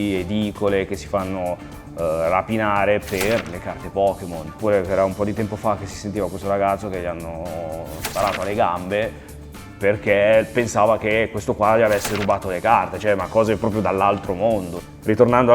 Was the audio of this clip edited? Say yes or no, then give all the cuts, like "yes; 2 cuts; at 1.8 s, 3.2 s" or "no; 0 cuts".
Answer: no; 0 cuts